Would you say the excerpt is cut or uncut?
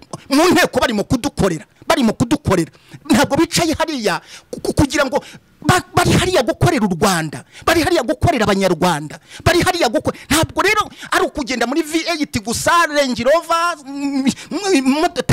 uncut